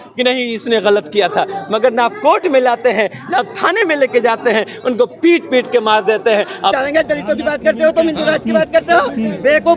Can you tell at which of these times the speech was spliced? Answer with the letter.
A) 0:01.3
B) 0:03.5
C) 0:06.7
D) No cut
C